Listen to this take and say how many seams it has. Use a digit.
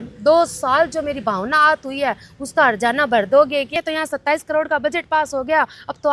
1